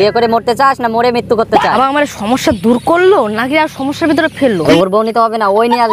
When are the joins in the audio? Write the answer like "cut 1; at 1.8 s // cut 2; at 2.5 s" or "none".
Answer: cut 1; at 1.7 s // cut 2; at 4.6 s